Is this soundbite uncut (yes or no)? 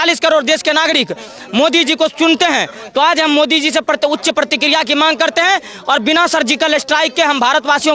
yes